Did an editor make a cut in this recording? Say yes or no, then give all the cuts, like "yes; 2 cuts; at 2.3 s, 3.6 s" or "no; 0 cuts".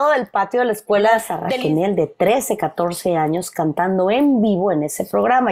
yes; 1 cut; at 1.4 s